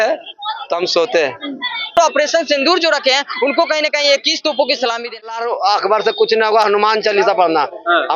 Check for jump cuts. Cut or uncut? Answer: cut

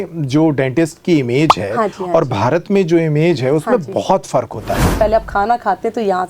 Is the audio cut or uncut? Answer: cut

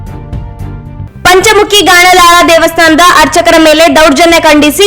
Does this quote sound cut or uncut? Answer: uncut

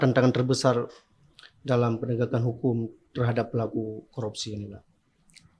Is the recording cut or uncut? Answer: uncut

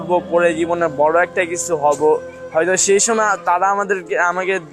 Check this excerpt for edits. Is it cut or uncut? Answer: cut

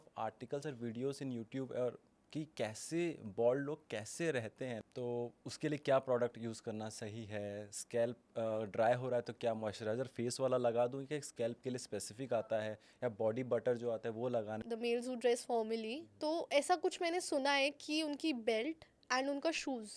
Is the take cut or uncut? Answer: cut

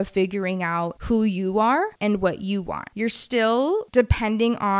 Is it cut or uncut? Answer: cut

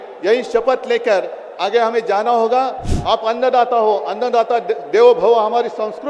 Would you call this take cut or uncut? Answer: cut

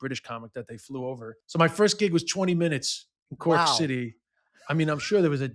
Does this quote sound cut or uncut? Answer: cut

